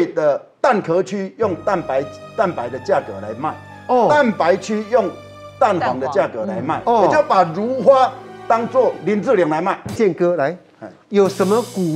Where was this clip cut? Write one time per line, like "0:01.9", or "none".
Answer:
0:09.9